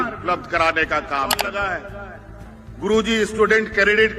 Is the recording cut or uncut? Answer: cut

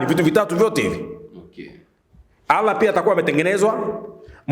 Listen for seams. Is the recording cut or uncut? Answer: uncut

